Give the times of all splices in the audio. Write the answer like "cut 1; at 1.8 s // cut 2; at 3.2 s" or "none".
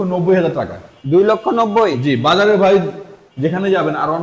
none